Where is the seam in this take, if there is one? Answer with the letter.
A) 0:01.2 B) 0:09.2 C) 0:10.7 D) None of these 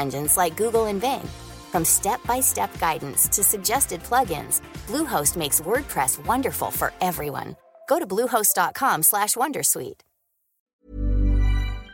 C